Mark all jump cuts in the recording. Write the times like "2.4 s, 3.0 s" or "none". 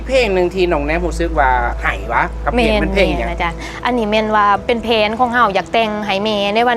1.9 s, 3.7 s